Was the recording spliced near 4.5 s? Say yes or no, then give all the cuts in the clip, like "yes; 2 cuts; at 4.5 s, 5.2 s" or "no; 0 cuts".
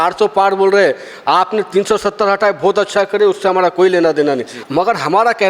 yes; 1 cut; at 4.5 s